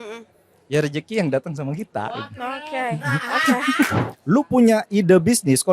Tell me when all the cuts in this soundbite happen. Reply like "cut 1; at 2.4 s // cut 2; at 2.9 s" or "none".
cut 1; at 4.1 s

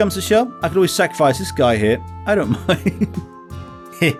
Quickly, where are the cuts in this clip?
none

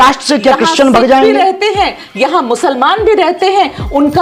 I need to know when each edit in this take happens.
none

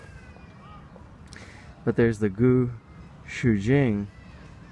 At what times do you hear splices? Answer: cut 1; at 1.9 s

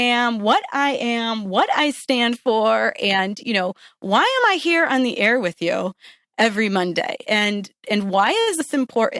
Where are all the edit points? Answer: none

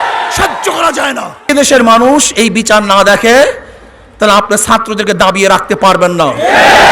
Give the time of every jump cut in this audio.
cut 1; at 1.5 s

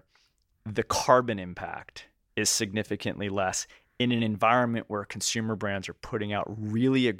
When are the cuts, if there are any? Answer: cut 1; at 2.2 s

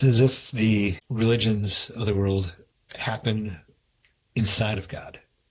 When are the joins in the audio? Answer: cut 1; at 1.0 s

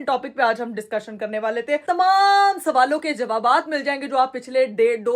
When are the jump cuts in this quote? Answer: cut 1; at 1.8 s

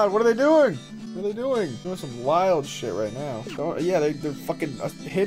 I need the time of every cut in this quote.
cut 1; at 0.9 s // cut 2; at 1.8 s // cut 3; at 3.5 s

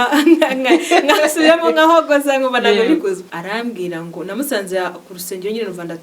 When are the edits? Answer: cut 1; at 3.3 s

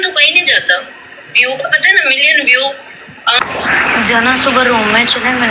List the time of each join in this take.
cut 1; at 3.4 s

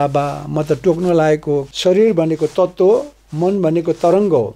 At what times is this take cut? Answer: cut 1; at 1.7 s

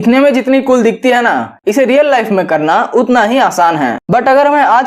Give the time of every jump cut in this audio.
cut 1; at 4.0 s

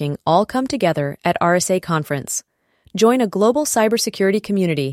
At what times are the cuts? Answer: none

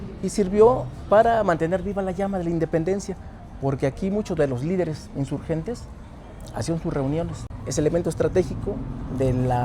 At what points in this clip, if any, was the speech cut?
cut 1; at 7.5 s

